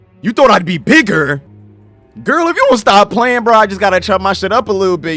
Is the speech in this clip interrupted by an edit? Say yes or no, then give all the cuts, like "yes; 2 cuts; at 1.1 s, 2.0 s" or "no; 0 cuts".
no; 0 cuts